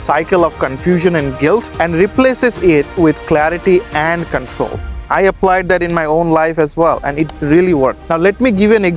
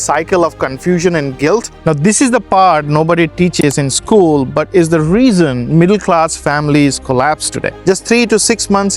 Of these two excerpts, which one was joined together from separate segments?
second; 2 cuts; at 1.7 s, 7.8 s

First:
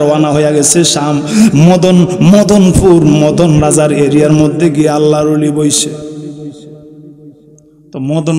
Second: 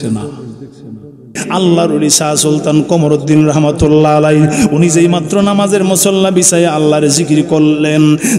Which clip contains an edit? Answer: second; 1 cut; at 1.4 s

